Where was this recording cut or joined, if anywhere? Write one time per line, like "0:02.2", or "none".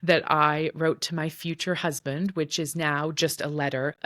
none